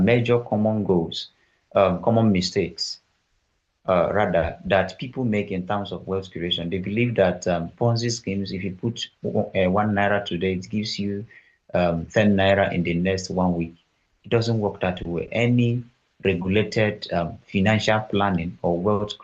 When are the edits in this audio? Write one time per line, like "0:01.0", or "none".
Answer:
none